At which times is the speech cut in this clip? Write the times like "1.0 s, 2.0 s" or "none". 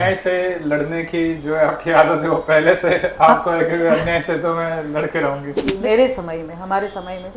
5.6 s